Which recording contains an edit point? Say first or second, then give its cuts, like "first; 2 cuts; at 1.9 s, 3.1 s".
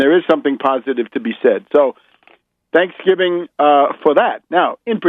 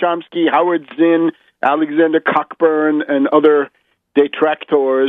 first; 1 cut; at 3.5 s